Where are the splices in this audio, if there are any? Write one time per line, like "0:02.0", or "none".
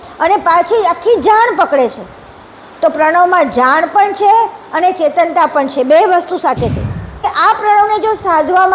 0:07.2